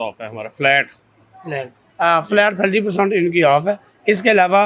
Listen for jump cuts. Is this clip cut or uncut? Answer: uncut